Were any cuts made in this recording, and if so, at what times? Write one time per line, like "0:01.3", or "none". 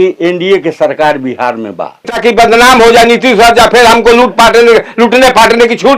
0:02.2